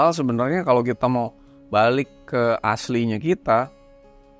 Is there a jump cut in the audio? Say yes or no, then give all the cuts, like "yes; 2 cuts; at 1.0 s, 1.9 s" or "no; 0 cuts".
no; 0 cuts